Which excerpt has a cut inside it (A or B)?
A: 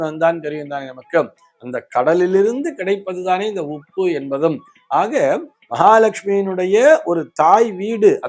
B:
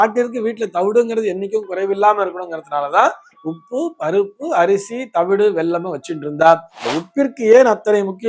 B